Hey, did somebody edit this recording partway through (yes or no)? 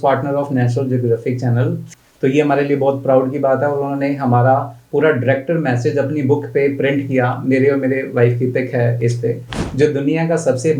yes